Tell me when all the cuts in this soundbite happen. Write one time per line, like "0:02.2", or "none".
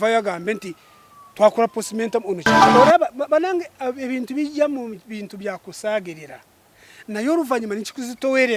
0:02.5

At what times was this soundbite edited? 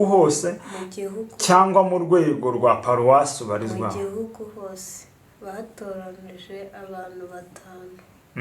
none

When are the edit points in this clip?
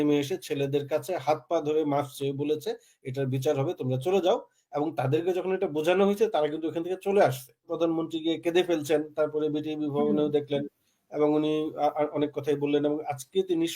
0:07.7

